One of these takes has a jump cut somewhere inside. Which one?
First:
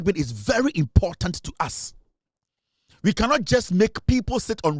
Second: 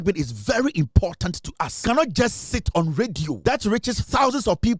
second; 2 cuts; at 1.8 s, 3.4 s

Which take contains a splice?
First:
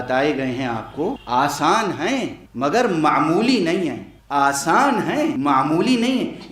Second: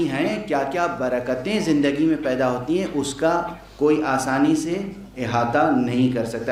first; 4 cuts; at 1.2 s, 2.4 s, 4.1 s, 5.4 s

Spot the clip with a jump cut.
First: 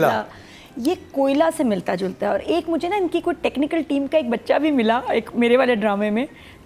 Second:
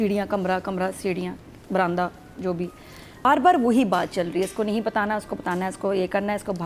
second; 1 cut; at 3.2 s

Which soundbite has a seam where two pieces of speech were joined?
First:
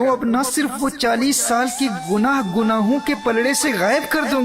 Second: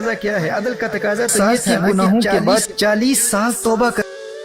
first; 1 cut; at 1.0 s

